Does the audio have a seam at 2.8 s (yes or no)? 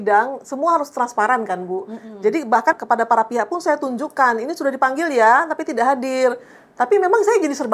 yes